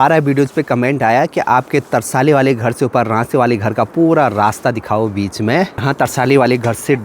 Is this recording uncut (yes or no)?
no